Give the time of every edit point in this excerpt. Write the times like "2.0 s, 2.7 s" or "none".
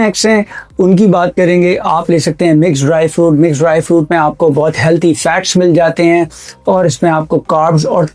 none